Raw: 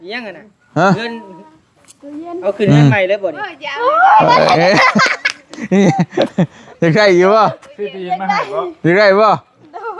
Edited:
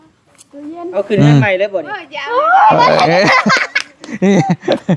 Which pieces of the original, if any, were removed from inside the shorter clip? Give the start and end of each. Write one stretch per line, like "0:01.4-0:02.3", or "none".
none

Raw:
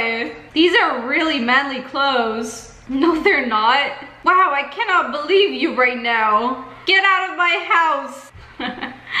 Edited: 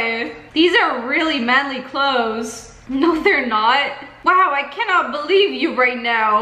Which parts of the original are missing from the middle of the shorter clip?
none

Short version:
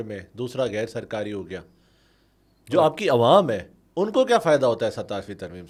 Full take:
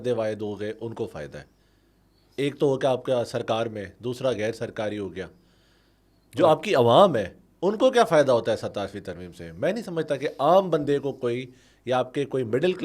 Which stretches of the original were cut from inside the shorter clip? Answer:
none

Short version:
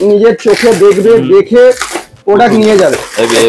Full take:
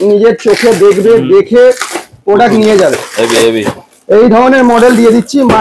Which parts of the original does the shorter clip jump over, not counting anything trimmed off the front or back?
none

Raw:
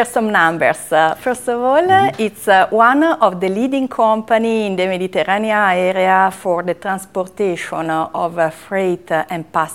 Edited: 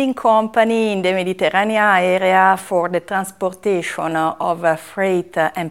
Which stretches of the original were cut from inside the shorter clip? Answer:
none

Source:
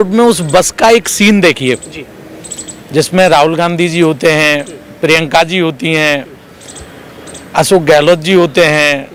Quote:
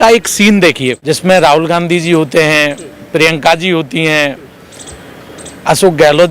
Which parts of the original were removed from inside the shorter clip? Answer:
0:01.8-0:02.9

